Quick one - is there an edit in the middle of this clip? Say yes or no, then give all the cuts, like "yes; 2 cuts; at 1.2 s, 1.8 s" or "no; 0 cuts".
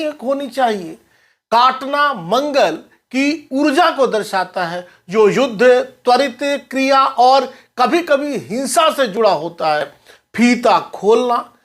yes; 1 cut; at 10.0 s